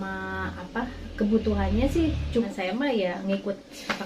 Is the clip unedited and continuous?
no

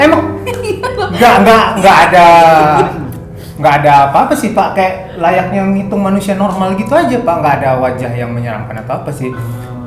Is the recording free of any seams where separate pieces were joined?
yes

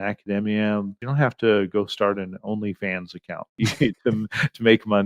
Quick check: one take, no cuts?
no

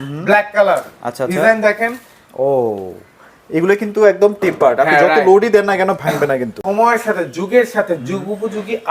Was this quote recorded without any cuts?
no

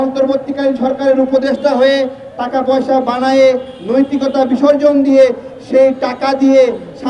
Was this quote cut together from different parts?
no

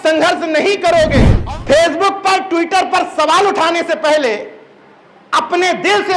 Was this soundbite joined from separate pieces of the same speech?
yes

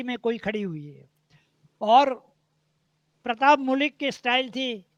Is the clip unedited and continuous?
yes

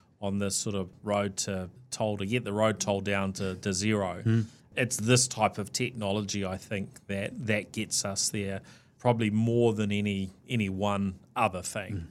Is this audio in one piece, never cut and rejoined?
yes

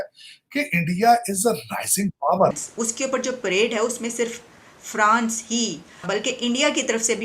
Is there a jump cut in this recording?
yes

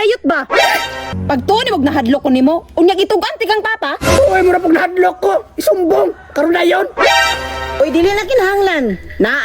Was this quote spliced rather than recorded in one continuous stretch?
yes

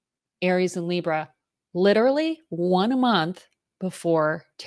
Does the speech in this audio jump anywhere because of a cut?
no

